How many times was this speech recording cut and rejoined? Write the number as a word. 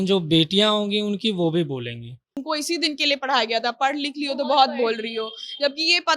one